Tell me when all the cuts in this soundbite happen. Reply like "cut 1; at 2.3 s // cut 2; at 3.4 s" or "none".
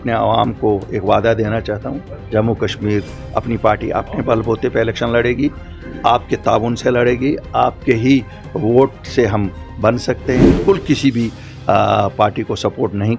cut 1; at 10.6 s